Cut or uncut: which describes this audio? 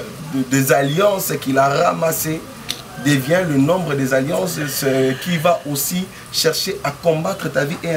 uncut